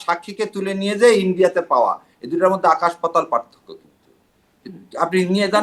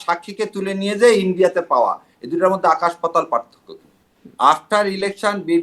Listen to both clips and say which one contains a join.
second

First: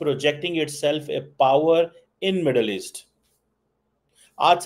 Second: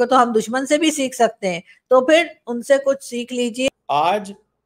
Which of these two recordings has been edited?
second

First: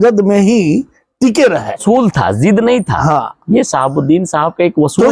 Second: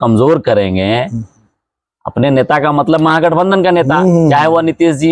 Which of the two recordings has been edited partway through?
first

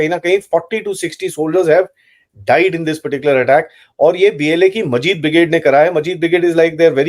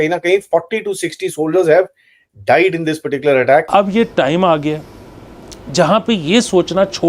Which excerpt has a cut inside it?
second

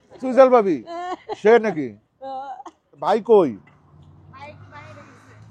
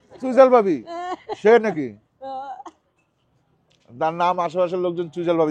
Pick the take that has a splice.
first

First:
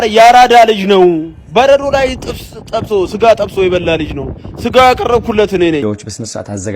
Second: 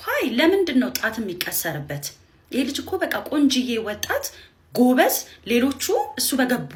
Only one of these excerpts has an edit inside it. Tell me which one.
first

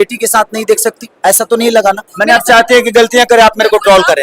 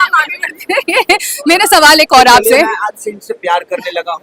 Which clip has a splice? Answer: first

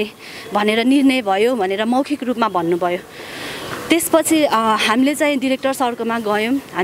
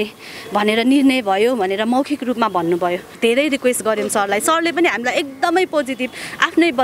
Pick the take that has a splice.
second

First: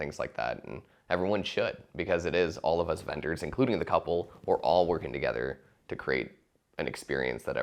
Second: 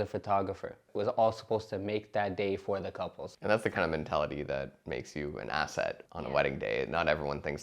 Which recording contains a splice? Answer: second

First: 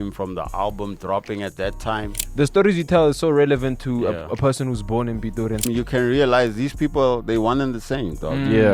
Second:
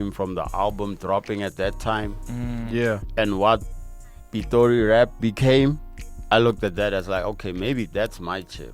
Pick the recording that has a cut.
first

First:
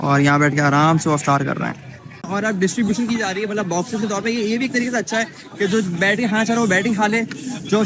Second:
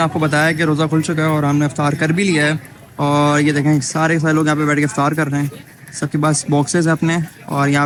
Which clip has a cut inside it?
first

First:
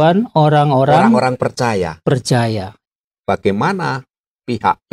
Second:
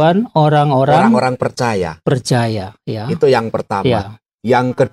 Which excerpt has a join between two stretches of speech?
first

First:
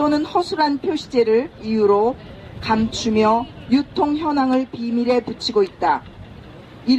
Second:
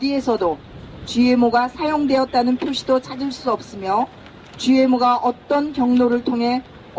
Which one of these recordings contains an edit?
second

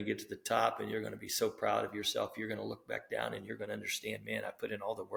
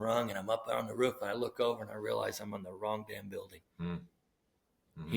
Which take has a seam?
second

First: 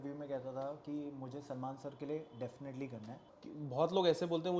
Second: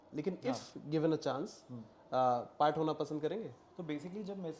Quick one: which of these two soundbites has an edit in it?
first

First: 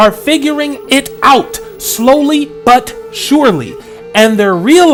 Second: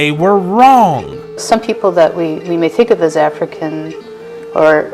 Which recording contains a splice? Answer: second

